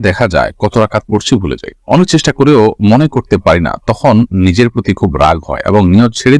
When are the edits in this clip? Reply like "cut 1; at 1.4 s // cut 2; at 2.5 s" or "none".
none